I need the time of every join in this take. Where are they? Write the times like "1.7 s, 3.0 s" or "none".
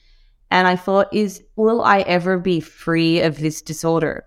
none